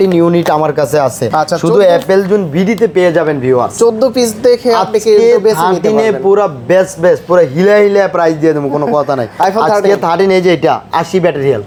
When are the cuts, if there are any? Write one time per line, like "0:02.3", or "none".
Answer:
none